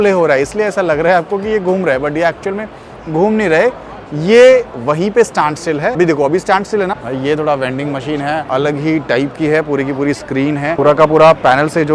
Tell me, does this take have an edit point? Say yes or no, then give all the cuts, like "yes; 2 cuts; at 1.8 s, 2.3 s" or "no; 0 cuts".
yes; 4 cuts; at 6.0 s, 7.0 s, 8.5 s, 10.8 s